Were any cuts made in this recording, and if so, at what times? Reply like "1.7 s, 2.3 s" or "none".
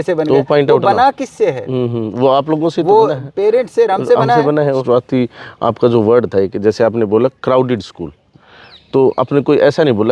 4.8 s

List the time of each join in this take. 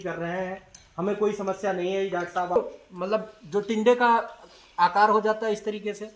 2.6 s

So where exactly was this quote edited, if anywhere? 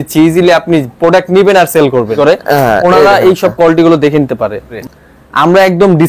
2.1 s, 4.7 s

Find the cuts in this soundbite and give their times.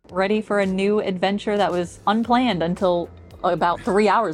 none

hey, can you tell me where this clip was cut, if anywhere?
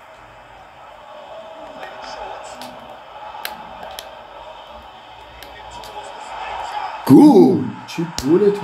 none

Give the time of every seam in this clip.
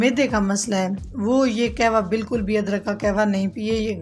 none

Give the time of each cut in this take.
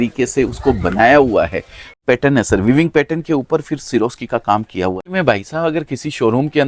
2.0 s, 5.1 s

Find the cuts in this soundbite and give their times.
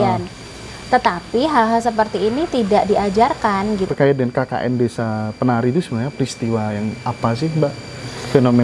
3.9 s

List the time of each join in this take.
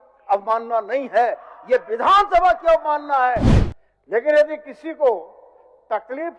3.5 s

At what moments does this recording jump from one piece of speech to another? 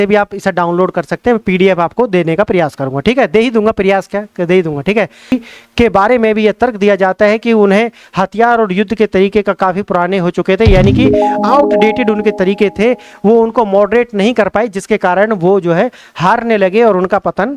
5.3 s

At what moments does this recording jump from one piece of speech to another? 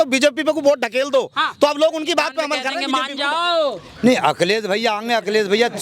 2.7 s

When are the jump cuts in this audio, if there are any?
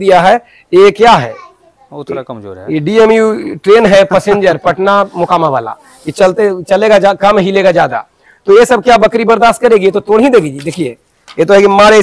none

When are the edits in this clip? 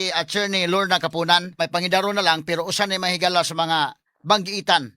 1.6 s

